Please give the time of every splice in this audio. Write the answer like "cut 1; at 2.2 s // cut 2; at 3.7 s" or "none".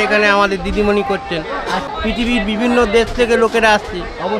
cut 1; at 1.9 s